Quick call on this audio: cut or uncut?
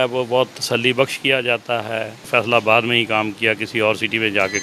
cut